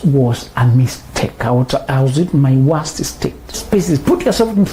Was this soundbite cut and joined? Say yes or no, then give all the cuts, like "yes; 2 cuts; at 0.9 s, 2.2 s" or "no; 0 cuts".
yes; 1 cut; at 3.6 s